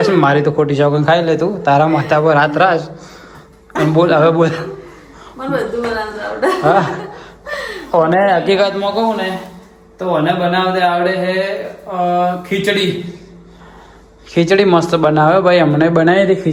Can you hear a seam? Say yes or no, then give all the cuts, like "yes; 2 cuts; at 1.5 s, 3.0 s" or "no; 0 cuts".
no; 0 cuts